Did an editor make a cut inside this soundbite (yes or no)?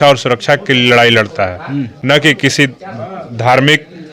no